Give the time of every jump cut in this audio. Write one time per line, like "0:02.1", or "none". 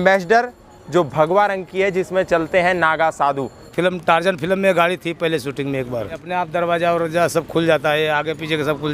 0:03.7
0:06.2